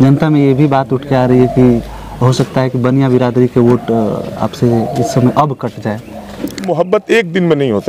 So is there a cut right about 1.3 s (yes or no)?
no